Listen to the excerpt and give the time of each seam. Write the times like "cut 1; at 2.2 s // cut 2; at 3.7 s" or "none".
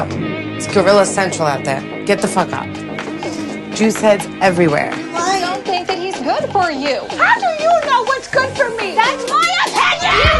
none